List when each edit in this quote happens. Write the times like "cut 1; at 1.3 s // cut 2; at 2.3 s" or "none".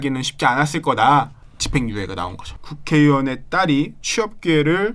cut 1; at 1.4 s // cut 2; at 2.6 s

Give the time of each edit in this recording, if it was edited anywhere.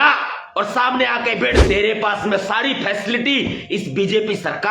cut 1; at 1.6 s

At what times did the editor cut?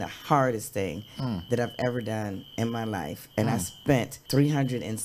cut 1; at 1.4 s // cut 2; at 4.2 s

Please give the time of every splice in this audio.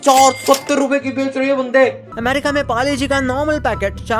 cut 1; at 2.1 s

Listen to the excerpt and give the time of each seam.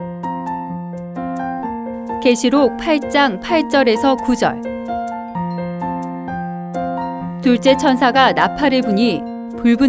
cut 1; at 1.6 s

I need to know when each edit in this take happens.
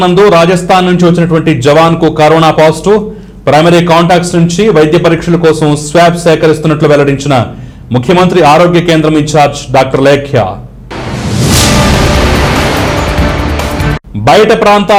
none

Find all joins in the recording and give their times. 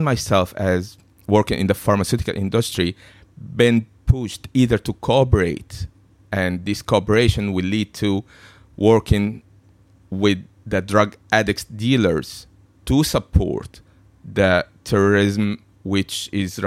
none

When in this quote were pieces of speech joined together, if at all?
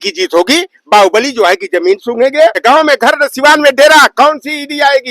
cut 1; at 2.6 s

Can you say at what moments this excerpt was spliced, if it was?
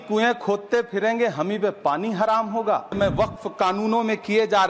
cut 1; at 3.0 s

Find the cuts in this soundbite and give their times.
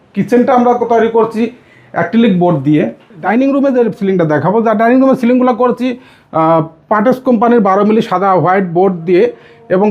cut 1; at 3.2 s

